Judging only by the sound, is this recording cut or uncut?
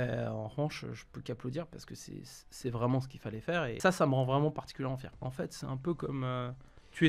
cut